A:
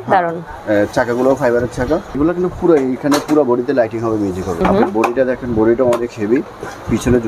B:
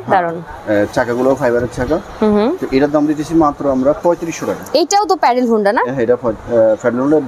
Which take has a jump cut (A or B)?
A